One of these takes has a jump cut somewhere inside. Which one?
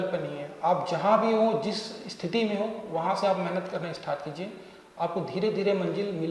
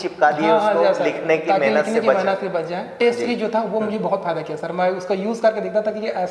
second; 1 cut; at 3.0 s

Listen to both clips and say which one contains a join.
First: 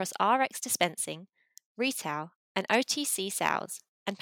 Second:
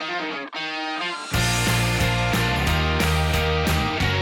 second; 1 cut; at 1.2 s

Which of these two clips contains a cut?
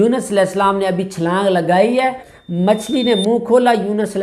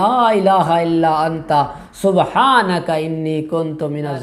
first; 1 cut; at 2.3 s

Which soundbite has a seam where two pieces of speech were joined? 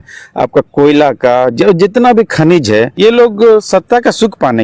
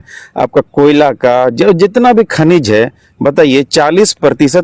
first; 1 cut; at 2.9 s

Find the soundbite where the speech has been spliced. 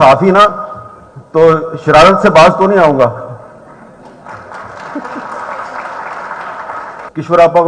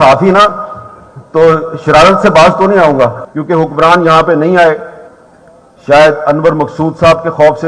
second; 1 cut; at 3.3 s

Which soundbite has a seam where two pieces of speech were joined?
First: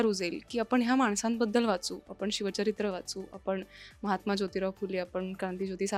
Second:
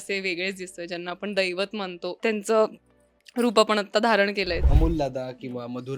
second; 2 cuts; at 2.2 s, 4.6 s

